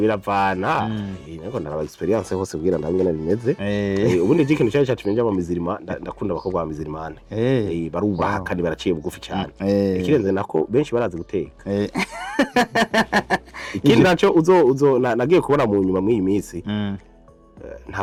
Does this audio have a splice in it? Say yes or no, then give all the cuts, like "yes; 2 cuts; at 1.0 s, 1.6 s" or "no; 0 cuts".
no; 0 cuts